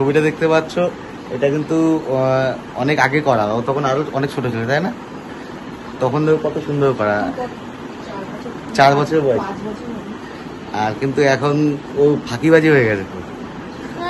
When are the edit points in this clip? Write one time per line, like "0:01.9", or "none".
none